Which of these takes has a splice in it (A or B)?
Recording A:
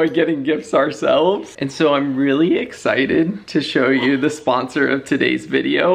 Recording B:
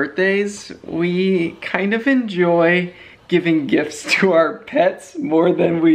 A